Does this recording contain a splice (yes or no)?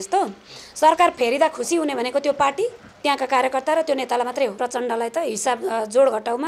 yes